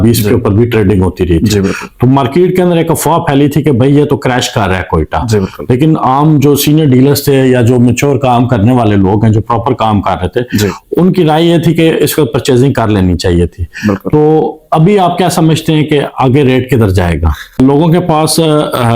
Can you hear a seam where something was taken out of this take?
yes; 1 cut; at 17.6 s

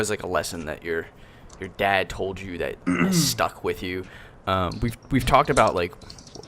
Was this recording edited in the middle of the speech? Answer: yes; 1 cut; at 2.0 s

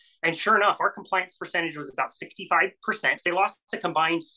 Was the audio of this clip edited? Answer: yes; 1 cut; at 3.2 s

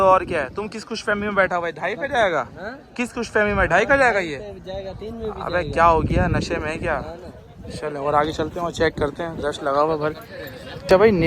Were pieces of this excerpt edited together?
no; 0 cuts

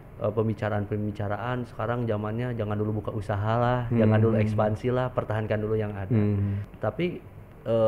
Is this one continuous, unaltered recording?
no; 1 cut; at 6.6 s

